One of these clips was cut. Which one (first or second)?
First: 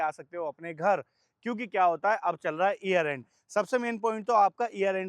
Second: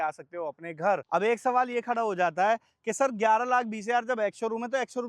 second